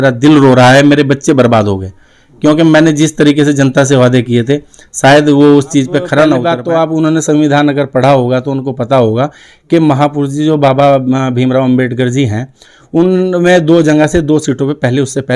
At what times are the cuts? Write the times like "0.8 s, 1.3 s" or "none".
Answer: 6.5 s